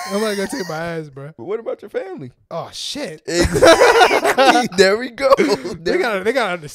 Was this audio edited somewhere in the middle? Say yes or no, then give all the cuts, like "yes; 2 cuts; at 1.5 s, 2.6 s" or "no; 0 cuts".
yes; 2 cuts; at 1.4 s, 2.4 s